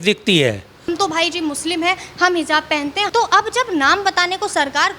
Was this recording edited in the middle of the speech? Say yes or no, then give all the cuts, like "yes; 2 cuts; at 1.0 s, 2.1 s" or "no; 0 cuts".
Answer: yes; 2 cuts; at 0.9 s, 3.0 s